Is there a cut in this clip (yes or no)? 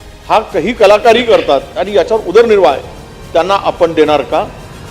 no